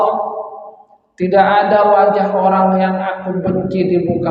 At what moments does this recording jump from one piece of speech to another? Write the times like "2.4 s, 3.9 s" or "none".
none